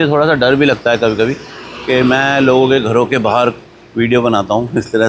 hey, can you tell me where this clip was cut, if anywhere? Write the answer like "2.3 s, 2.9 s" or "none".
none